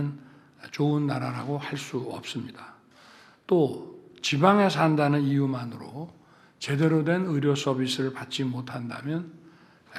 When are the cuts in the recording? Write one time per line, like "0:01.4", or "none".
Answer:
none